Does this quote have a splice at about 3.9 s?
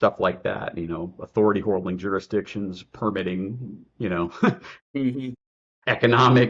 no; 0 cuts

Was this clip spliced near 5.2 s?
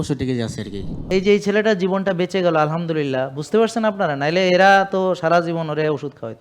no; 1 cut; at 1.1 s

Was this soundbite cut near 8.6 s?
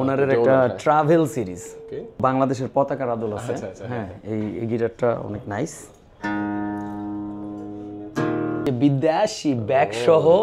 yes; 2 cuts; at 2.2 s, 8.6 s

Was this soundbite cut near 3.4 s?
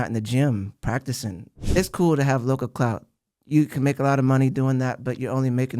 no; 1 cut; at 1.6 s

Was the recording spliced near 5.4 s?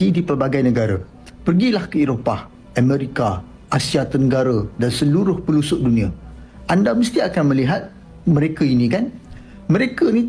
no; 0 cuts

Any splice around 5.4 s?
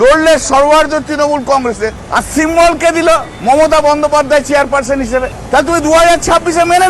yes; 3 cuts; at 2.0 s, 3.3 s, 5.4 s

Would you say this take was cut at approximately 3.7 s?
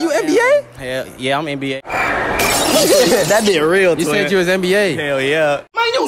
no; 1 cut; at 1.9 s

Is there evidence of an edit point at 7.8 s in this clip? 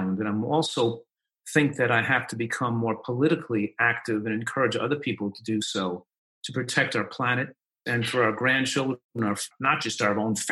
yes; 2 cuts; at 7.8 s, 9.5 s

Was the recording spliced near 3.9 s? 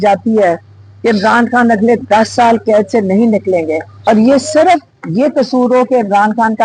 yes; 1 cut; at 3.9 s

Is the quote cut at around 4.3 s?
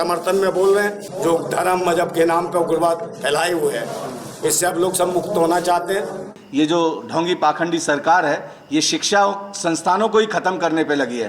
no; 2 cuts; at 1.0 s, 6.3 s

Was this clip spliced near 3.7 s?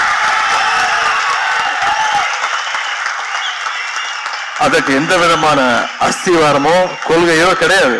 no; 0 cuts

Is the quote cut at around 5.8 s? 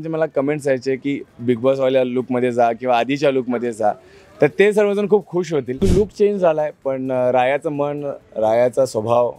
yes; 1 cut; at 5.8 s

